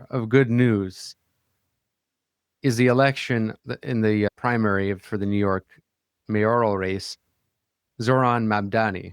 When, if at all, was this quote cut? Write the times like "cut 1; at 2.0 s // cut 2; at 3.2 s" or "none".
cut 1; at 3.6 s // cut 2; at 7.9 s

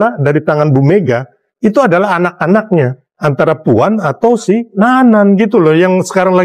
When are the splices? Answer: cut 1; at 3.2 s // cut 2; at 4.7 s

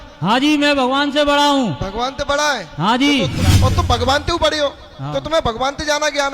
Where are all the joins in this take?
cut 1; at 3.5 s

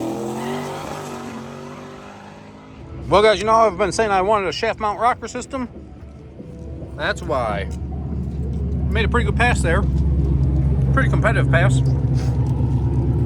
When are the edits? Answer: cut 1; at 2.8 s

